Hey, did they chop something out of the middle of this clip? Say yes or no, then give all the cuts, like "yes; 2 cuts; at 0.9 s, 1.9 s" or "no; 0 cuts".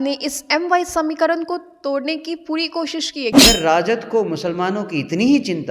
yes; 1 cut; at 3.3 s